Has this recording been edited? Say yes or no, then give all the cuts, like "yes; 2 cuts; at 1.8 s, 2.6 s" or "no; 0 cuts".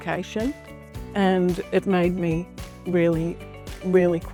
no; 0 cuts